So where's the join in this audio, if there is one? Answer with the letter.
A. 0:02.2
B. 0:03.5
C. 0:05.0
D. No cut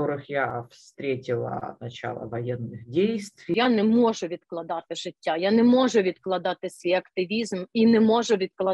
B